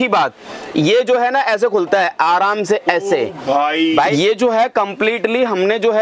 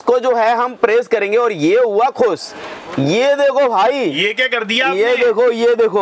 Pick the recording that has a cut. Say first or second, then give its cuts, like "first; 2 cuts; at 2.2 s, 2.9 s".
first; 1 cut; at 4.1 s